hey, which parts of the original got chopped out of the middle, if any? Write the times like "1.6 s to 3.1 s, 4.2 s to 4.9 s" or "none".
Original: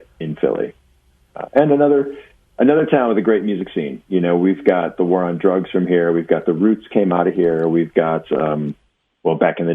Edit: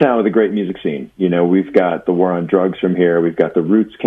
none